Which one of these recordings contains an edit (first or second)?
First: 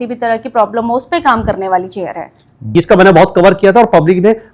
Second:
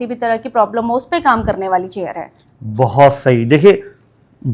first